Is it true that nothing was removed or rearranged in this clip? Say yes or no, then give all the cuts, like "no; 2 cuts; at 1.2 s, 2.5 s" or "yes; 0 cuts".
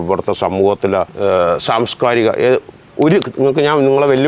no; 1 cut; at 1.1 s